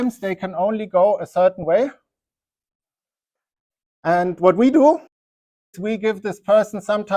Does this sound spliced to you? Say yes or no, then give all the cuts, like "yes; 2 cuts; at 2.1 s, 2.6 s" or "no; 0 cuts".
no; 0 cuts